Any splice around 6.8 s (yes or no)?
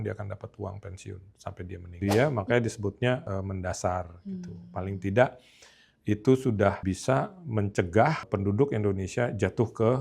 yes